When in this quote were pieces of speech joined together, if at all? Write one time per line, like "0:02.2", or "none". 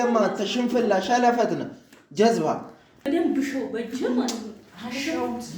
0:03.0